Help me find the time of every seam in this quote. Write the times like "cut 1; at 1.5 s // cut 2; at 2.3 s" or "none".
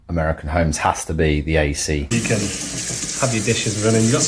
cut 1; at 2.1 s